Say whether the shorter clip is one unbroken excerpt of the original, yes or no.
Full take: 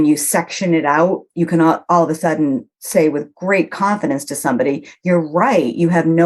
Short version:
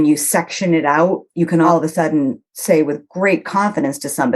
no